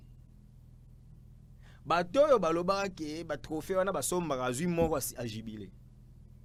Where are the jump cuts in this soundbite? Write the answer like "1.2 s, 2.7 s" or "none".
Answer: none